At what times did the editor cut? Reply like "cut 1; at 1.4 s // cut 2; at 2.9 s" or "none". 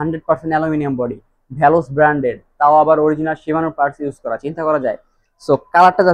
none